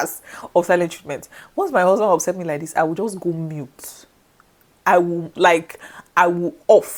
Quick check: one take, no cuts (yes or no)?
yes